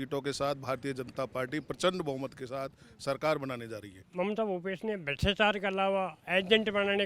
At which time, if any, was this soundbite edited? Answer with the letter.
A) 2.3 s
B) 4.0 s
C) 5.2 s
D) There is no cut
B